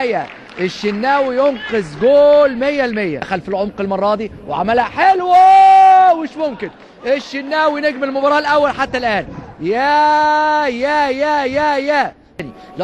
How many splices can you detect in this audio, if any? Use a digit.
1